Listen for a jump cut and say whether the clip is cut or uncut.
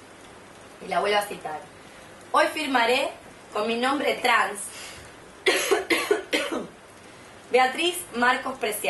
uncut